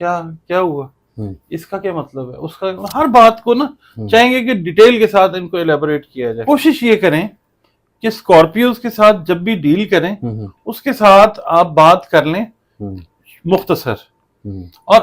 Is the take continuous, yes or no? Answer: no